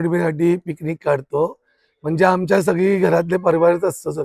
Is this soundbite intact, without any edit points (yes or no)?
yes